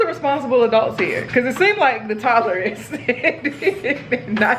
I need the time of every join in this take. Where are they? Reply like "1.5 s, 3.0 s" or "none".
none